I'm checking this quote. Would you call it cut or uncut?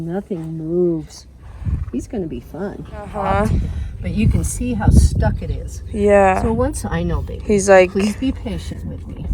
cut